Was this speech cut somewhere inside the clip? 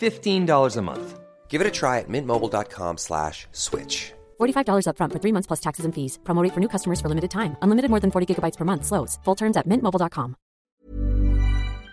yes; 1 cut; at 10.7 s

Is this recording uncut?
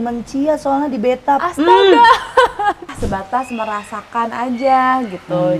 no; 1 cut; at 3.0 s

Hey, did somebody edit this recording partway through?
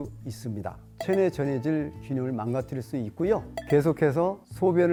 no; 0 cuts

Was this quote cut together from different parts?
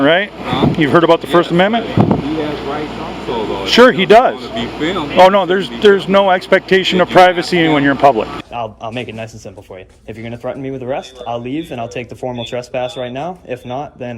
yes; 1 cut; at 8.4 s

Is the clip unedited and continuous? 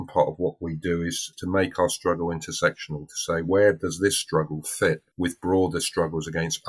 no; 2 cuts; at 1.3 s, 5.1 s

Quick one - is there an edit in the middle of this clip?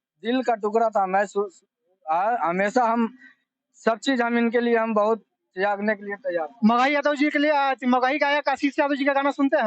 no; 0 cuts

